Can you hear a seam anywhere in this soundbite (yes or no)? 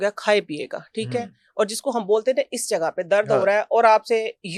no